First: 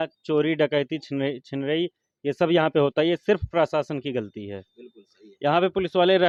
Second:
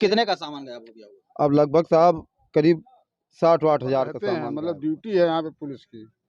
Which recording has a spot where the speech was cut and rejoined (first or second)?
second